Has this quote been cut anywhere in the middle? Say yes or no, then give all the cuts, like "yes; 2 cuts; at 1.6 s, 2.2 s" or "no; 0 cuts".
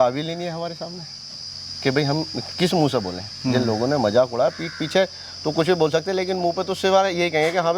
no; 0 cuts